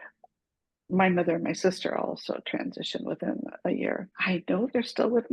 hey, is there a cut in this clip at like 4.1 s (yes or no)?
yes